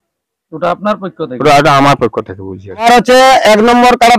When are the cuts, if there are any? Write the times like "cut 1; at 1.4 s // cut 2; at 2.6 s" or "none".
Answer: cut 1; at 2.8 s